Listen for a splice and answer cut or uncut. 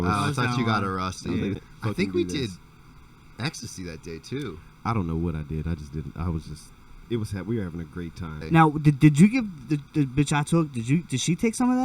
cut